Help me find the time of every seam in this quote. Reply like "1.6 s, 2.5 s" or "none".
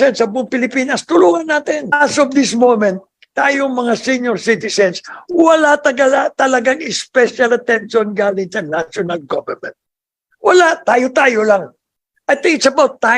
1.9 s